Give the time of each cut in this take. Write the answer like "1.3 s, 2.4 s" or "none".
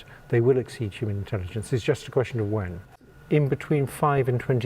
3.0 s